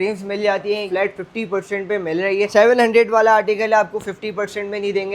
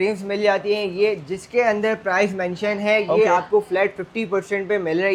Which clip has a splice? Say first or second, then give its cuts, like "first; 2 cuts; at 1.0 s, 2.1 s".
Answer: first; 2 cuts; at 0.9 s, 2.5 s